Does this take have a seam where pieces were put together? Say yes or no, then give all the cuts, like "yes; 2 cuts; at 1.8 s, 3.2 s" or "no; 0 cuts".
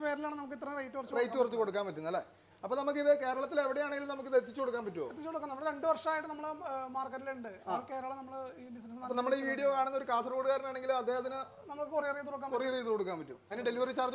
no; 0 cuts